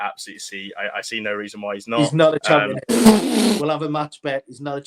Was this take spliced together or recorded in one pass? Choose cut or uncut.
cut